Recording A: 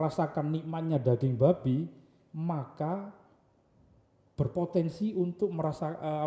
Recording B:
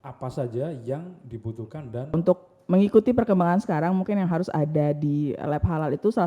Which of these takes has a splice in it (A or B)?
B